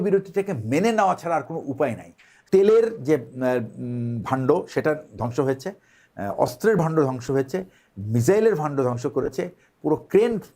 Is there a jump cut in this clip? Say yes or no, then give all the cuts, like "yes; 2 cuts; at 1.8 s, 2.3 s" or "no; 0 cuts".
yes; 1 cut; at 2.4 s